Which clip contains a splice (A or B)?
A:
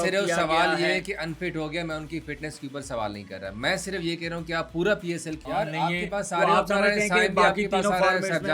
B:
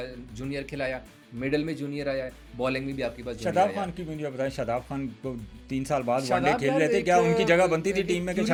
A